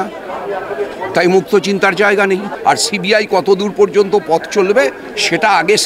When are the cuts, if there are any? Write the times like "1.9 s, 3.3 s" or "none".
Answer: 2.5 s